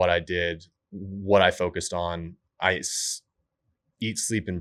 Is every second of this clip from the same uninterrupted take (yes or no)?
yes